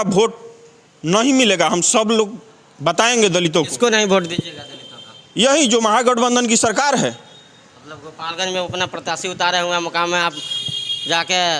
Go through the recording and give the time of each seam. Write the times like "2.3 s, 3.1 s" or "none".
none